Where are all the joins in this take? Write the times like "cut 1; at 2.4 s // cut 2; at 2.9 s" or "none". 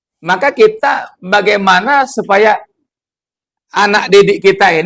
none